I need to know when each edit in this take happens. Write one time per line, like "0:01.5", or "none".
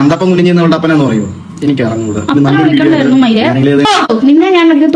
0:03.9

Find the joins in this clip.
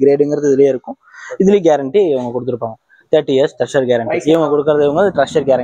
none

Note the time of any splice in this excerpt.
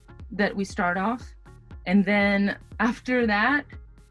none

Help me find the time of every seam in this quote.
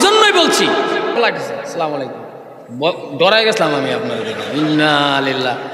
0:01.2

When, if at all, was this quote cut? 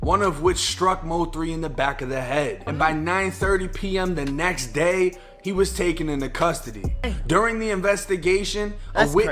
0:02.7
0:07.1

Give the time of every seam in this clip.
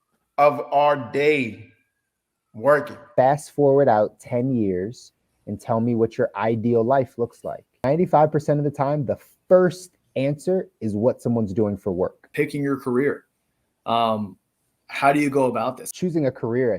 0:03.0
0:07.8
0:12.3
0:15.8

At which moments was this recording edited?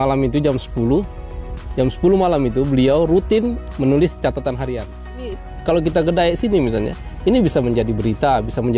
0:05.5

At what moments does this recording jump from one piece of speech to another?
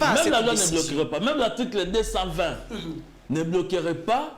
none

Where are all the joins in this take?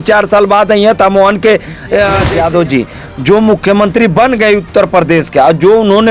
0:02.2

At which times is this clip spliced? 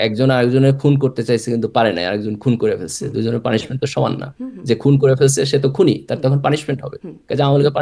none

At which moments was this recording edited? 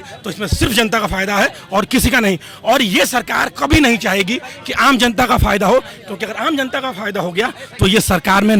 none

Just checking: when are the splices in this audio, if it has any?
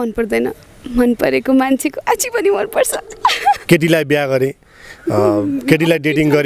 0:03.6

